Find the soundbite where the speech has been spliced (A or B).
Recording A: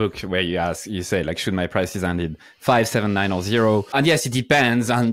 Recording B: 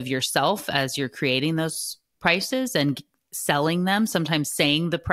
A